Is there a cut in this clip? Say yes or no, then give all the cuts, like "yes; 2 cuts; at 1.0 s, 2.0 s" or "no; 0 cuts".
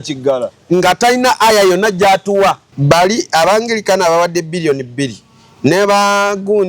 yes; 1 cut; at 2.7 s